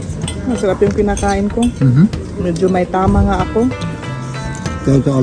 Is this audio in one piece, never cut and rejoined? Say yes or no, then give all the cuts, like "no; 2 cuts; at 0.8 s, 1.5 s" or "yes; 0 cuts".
yes; 0 cuts